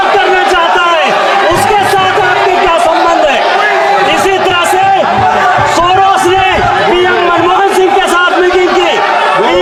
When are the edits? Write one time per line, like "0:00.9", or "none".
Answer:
none